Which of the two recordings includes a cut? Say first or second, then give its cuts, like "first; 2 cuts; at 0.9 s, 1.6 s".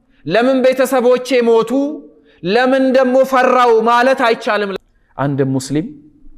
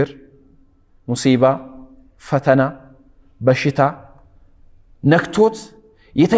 first; 1 cut; at 4.7 s